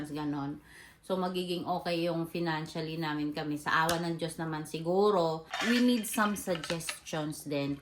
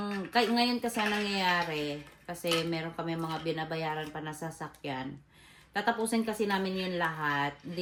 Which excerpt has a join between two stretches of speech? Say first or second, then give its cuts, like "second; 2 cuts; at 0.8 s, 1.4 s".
first; 1 cut; at 5.5 s